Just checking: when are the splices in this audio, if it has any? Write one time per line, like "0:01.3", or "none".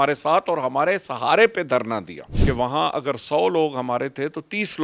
0:02.3